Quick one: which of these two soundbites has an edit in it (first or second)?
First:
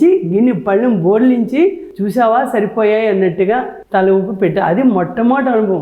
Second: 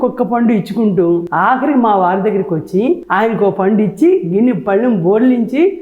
second